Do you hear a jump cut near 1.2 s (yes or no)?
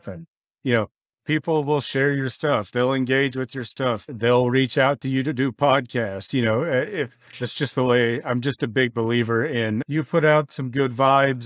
no